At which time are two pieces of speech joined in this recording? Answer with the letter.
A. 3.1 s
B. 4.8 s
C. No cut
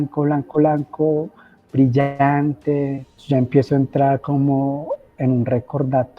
A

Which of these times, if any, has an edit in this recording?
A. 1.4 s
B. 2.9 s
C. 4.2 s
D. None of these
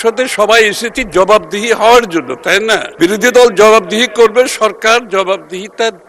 B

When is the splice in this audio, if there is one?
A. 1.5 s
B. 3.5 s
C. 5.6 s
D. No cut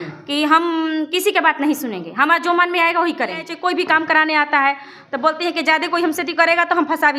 B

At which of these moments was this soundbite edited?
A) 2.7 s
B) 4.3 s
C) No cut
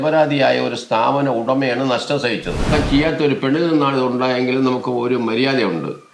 A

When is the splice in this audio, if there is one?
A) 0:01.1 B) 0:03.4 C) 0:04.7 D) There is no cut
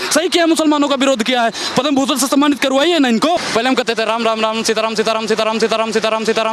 B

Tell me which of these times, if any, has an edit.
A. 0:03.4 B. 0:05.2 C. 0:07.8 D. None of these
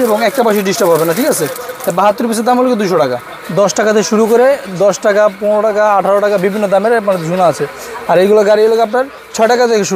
A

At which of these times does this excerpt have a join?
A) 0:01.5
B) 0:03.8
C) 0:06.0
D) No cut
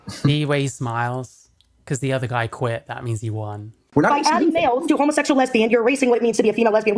B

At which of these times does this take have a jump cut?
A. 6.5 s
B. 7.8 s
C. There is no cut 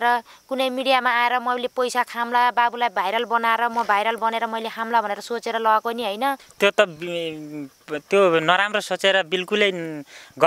A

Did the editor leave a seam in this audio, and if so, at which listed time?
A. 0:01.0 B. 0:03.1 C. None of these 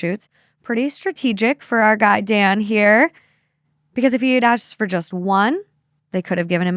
C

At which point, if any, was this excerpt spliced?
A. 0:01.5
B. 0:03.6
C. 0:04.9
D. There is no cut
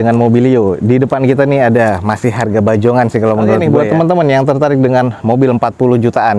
B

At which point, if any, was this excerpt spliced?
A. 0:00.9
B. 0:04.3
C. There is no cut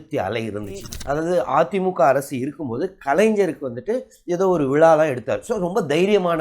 A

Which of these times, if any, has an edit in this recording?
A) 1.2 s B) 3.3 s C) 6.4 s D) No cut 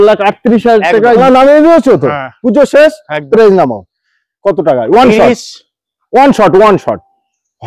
A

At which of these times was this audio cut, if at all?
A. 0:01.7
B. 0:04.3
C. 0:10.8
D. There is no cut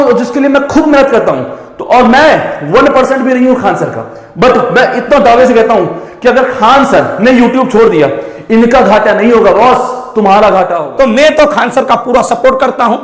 C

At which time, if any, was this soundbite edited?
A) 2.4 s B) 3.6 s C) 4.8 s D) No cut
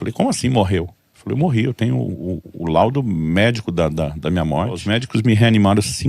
C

